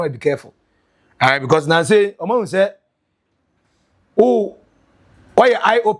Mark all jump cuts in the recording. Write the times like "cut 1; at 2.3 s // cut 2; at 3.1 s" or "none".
none